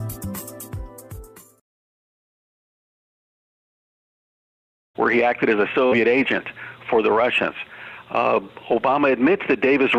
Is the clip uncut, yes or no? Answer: yes